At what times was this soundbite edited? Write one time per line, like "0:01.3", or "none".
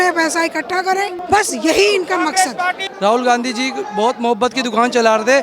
0:01.2
0:02.9